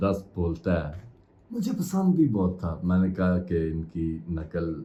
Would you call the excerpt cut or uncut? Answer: uncut